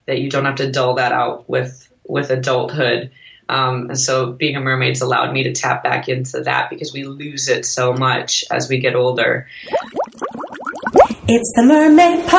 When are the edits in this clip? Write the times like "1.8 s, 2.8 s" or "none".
9.5 s